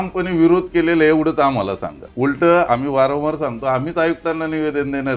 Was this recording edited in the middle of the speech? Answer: yes; 2 cuts; at 2.0 s, 2.7 s

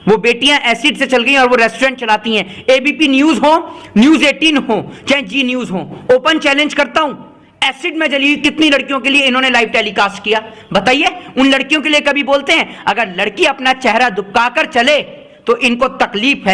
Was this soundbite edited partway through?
no; 0 cuts

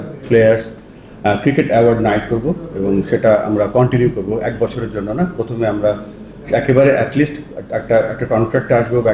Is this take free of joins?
yes; 0 cuts

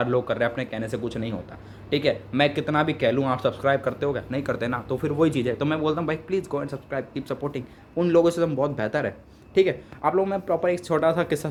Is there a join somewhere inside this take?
no; 0 cuts

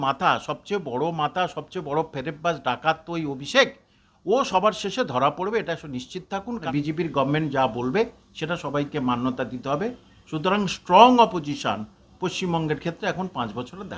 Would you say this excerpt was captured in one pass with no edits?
no; 1 cut; at 6.6 s

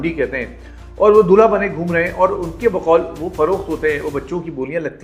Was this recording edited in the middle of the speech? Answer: no; 0 cuts

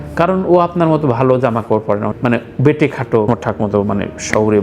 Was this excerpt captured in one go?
no; 2 cuts; at 2.1 s, 3.3 s

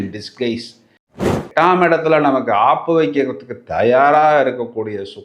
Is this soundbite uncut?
no; 1 cut; at 1.3 s

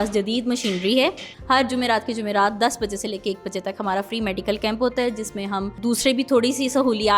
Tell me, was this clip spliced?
yes; 2 cuts; at 1.3 s, 5.7 s

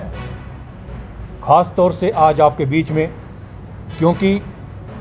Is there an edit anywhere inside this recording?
no; 0 cuts

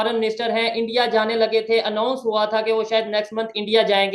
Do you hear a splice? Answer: no; 0 cuts

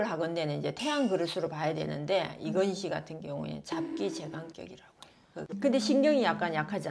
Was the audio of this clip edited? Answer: yes; 1 cut; at 5.4 s

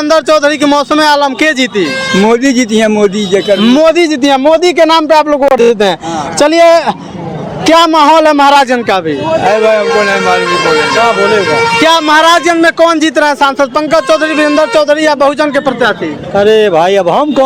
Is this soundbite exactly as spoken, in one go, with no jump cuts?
yes; 0 cuts

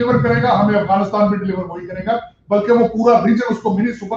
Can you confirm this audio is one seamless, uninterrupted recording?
yes; 0 cuts

